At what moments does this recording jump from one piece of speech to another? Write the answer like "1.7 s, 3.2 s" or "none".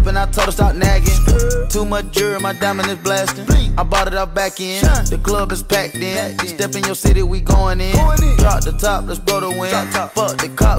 1.1 s